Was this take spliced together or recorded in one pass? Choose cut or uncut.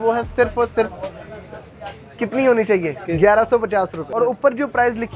cut